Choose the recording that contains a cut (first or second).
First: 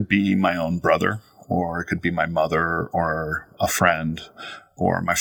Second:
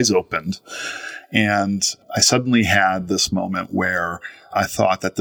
second